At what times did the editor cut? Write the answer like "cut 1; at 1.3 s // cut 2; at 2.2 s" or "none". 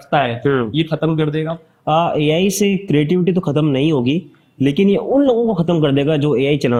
none